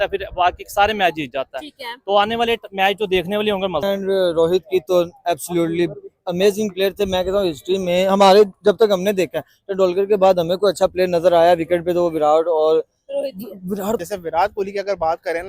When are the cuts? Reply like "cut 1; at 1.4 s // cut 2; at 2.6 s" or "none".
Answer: cut 1; at 3.8 s // cut 2; at 14.0 s